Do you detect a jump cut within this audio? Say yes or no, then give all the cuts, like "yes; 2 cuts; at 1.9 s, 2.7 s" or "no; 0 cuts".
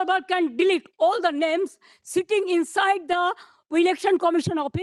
no; 0 cuts